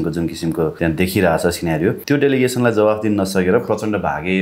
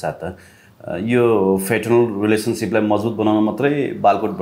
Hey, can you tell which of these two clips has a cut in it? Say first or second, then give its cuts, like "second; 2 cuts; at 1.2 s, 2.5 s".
first; 2 cuts; at 0.7 s, 2.0 s